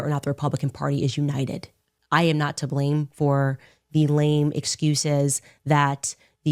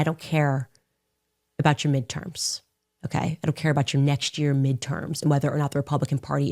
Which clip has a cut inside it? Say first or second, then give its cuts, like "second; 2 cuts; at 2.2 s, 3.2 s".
first; 1 cut; at 2.0 s